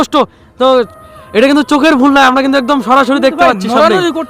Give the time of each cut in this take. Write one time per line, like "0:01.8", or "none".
0:00.9